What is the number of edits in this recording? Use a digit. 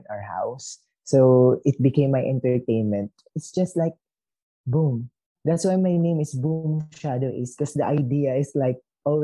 1